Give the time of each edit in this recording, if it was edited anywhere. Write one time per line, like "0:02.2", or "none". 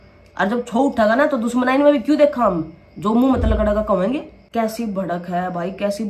0:04.4